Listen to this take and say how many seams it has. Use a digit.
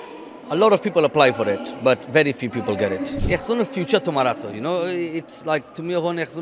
1